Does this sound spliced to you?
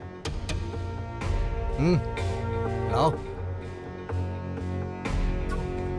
no; 0 cuts

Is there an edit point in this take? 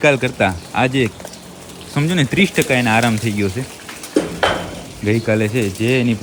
no; 0 cuts

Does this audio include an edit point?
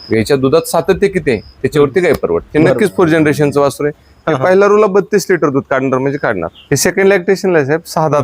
yes; 2 cuts; at 2.5 s, 6.5 s

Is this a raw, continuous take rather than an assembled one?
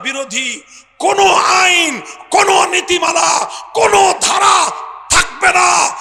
yes; 0 cuts

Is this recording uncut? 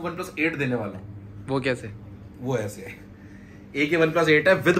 yes; 0 cuts

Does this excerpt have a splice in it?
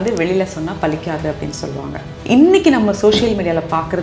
yes; 1 cut; at 2.1 s

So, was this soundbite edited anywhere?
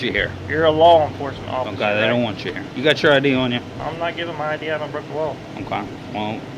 no; 0 cuts

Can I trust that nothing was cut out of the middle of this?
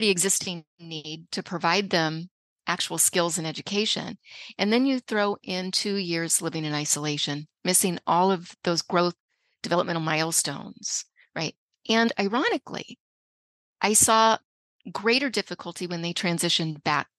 yes; 0 cuts

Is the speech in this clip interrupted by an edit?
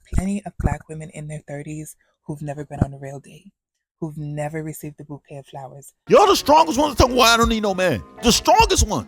yes; 2 cuts; at 1.3 s, 5.9 s

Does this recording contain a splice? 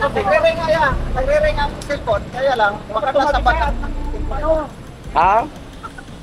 no; 0 cuts

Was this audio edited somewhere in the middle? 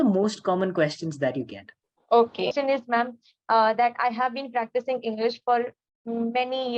yes; 1 cut; at 2.5 s

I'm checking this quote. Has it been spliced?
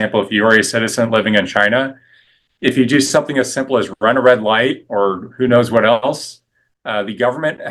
no; 0 cuts

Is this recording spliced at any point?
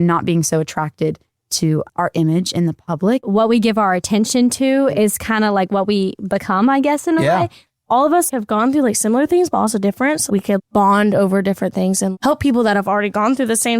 yes; 2 cuts; at 3.2 s, 7.6 s

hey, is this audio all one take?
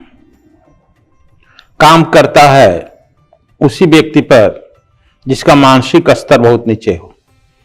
yes; 0 cuts

